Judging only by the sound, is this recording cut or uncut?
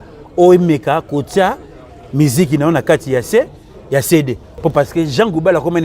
cut